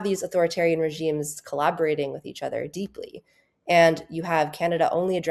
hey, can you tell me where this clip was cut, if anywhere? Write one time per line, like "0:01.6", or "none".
0:01.4